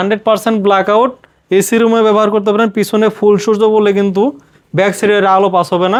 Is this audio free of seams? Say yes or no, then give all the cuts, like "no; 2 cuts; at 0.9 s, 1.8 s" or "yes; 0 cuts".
yes; 0 cuts